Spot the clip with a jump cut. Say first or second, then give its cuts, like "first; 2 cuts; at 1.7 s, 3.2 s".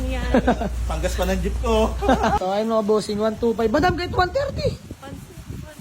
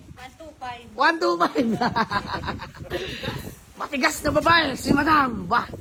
first; 1 cut; at 2.4 s